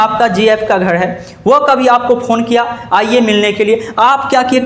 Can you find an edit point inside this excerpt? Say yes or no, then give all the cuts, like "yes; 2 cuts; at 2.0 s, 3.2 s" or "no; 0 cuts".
no; 0 cuts